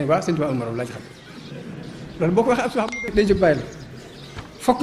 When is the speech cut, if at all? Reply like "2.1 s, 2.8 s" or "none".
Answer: 3.0 s